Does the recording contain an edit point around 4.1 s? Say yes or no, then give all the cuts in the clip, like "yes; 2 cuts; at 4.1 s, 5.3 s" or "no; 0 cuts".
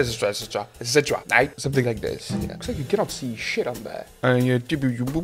yes; 1 cut; at 4.1 s